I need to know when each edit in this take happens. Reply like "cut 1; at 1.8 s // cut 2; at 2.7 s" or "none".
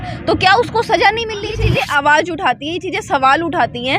cut 1; at 1.7 s